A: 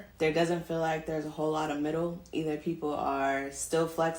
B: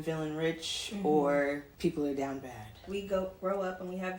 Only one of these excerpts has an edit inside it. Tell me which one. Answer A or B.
B